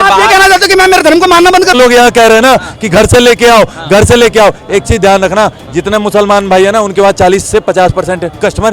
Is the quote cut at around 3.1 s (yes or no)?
no